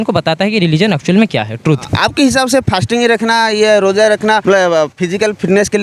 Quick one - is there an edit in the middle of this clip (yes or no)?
yes